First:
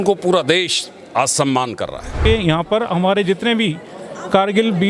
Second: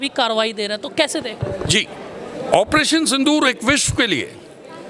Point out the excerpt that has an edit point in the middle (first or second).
first